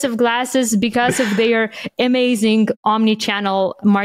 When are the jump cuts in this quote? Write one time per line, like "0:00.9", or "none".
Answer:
0:02.8